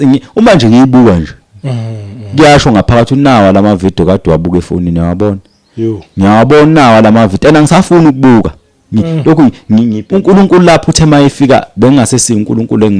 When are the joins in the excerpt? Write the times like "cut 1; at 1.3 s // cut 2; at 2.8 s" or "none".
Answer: cut 1; at 10.0 s